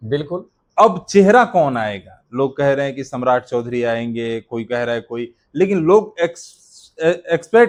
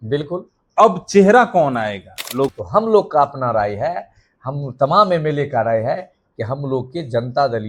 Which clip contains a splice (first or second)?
second